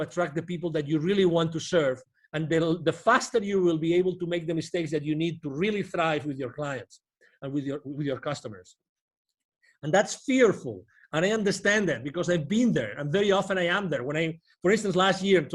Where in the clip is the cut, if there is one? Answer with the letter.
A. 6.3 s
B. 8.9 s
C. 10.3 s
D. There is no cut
D